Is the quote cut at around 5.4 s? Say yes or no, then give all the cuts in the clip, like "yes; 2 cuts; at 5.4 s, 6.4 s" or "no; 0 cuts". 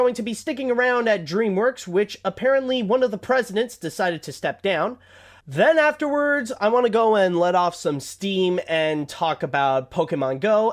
yes; 1 cut; at 5.4 s